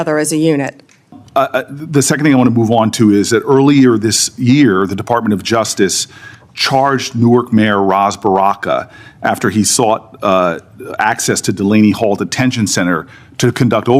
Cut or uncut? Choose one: cut